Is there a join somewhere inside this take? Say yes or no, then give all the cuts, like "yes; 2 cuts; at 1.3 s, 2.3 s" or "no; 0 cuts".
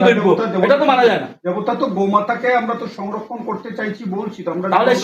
no; 0 cuts